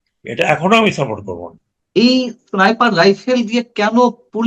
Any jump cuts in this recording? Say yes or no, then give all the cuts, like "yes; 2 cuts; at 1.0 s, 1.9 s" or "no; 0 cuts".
yes; 1 cut; at 1.8 s